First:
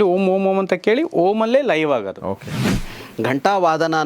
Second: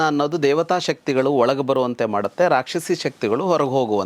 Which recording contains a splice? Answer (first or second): first